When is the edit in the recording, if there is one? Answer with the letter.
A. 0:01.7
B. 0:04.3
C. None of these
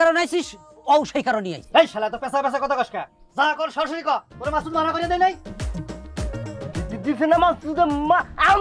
B